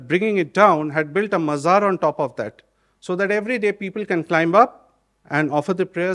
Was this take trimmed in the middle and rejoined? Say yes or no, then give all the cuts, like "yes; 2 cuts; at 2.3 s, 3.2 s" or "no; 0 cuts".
no; 0 cuts